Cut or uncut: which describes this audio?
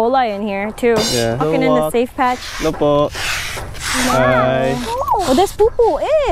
uncut